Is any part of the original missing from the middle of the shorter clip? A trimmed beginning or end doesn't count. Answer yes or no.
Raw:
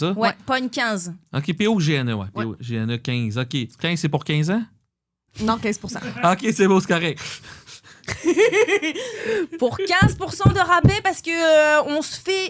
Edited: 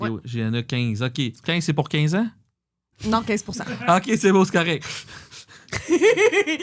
no